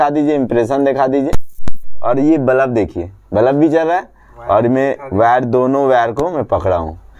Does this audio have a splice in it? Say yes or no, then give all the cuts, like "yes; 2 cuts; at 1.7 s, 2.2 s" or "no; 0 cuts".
no; 0 cuts